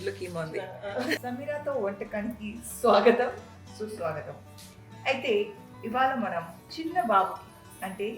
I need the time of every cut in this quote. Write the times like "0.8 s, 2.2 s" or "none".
1.2 s